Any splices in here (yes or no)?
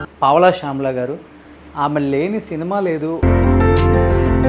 yes